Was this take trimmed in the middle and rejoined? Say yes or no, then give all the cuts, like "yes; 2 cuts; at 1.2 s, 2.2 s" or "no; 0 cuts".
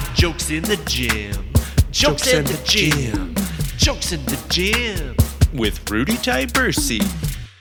no; 0 cuts